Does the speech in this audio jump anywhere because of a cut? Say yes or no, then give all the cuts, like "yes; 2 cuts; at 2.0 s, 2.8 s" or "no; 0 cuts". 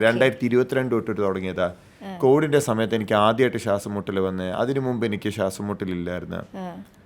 no; 0 cuts